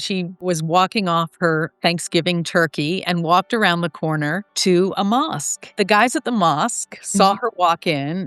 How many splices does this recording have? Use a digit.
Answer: 2